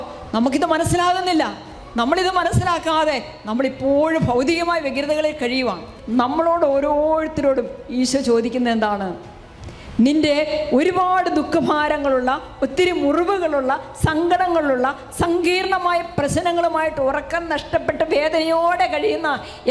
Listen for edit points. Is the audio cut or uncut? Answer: cut